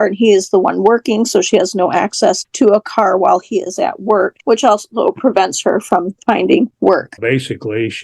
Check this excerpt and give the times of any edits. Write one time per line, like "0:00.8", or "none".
0:02.5
0:04.4
0:07.1